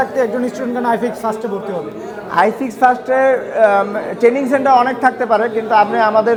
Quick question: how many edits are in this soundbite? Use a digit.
0